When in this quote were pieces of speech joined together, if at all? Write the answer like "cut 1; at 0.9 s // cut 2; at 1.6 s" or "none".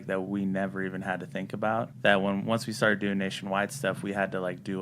cut 1; at 1.9 s